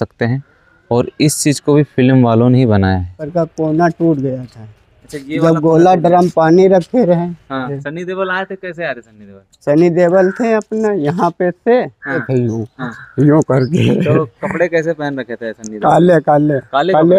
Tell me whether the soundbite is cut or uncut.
cut